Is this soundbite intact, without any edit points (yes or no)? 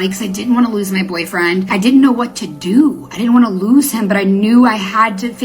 no